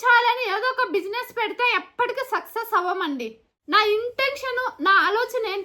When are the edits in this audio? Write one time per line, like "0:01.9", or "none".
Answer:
0:03.5